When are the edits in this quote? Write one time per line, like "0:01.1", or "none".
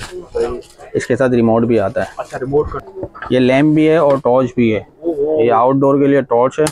0:02.8